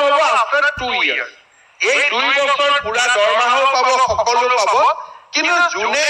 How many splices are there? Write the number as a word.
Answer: zero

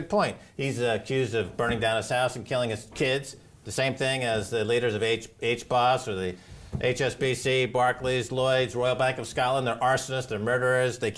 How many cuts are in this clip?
one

